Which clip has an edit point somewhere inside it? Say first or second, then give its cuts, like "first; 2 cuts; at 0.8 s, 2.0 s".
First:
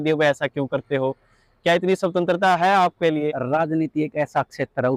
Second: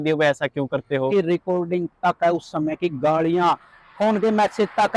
second; 1 cut; at 1.1 s